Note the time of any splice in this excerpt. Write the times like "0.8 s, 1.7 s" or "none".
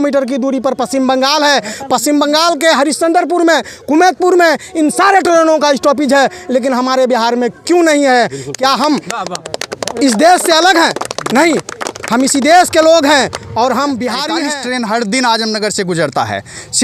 14.3 s